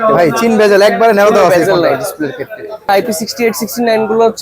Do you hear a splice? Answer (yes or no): yes